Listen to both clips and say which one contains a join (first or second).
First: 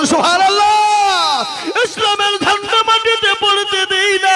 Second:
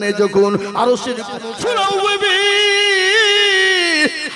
second